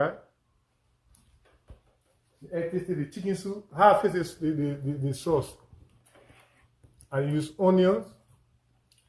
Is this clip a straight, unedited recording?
yes; 0 cuts

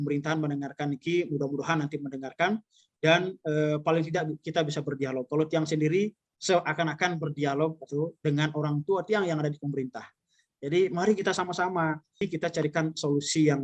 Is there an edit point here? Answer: yes; 1 cut; at 12.2 s

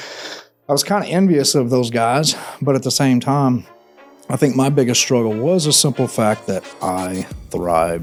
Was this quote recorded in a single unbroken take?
yes; 0 cuts

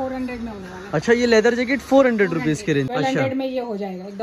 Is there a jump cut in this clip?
yes; 1 cut; at 2.9 s

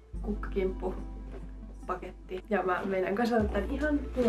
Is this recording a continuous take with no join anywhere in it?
yes; 0 cuts

